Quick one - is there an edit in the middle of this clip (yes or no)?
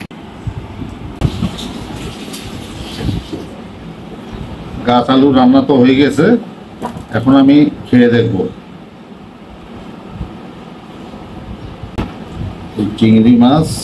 yes